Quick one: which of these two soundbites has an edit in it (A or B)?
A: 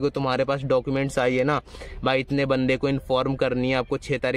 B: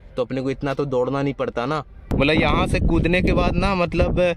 B